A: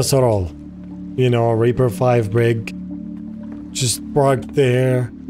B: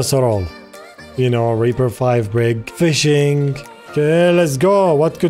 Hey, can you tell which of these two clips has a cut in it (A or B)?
B